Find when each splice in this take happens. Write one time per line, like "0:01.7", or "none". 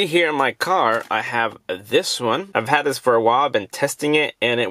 none